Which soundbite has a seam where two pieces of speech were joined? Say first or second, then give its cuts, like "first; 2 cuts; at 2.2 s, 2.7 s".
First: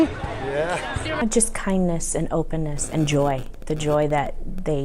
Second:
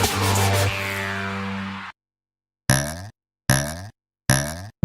first; 1 cut; at 2.8 s